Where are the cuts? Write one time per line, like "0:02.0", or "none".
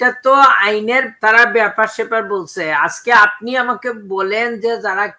0:01.1

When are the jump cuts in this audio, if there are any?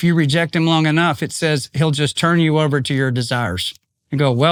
none

